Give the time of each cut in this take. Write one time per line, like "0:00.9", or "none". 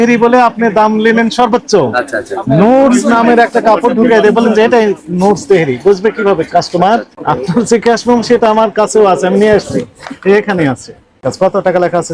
0:07.1
0:11.3